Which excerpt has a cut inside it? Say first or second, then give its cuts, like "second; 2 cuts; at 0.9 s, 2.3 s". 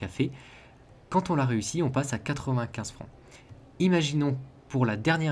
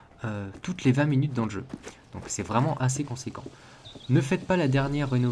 second; 1 cut; at 1.7 s